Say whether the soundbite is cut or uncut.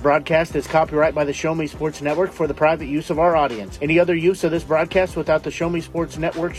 uncut